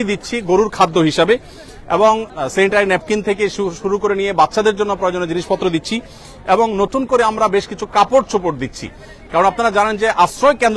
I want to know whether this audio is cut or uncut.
uncut